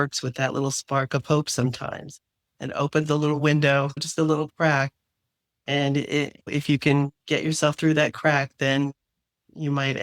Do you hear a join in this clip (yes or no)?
yes